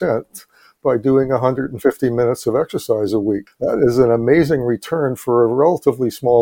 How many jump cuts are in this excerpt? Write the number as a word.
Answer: one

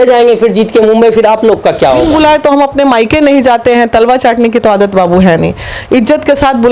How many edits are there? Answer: one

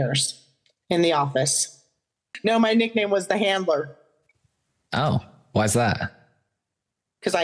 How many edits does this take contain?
one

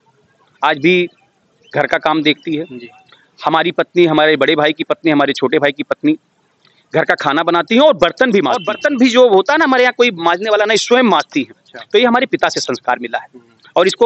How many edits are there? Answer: one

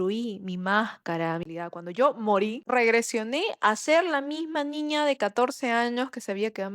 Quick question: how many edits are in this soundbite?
two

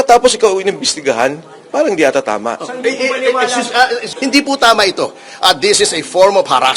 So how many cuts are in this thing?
one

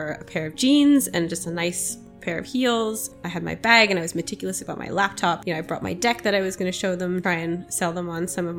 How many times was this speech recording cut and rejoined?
three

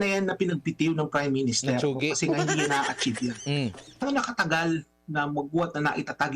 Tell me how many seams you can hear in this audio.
one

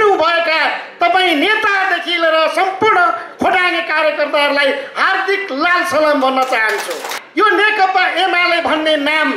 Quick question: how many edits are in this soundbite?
one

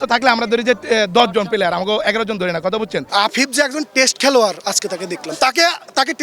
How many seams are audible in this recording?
one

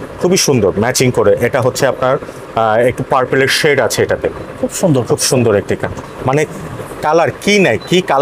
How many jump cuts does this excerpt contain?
two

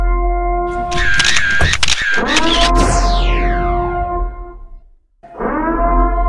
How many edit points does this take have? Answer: zero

